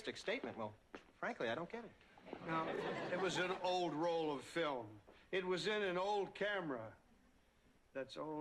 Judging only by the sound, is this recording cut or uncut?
uncut